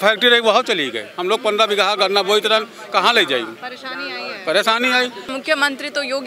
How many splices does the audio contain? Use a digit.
1